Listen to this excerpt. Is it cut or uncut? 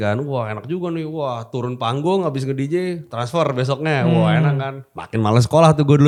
uncut